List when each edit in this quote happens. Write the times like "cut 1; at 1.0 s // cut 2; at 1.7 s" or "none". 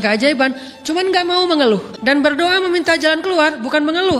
cut 1; at 1.9 s